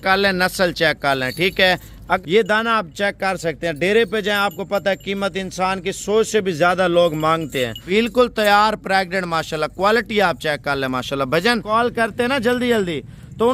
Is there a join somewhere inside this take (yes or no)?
yes